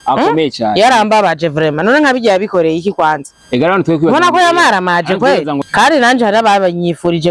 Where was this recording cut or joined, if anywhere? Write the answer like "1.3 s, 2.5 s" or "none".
5.6 s